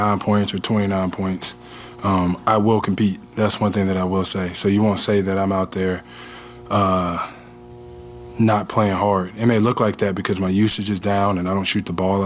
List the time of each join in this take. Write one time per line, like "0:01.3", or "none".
none